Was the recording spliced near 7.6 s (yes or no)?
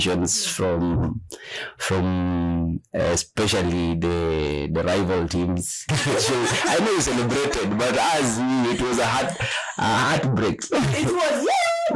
no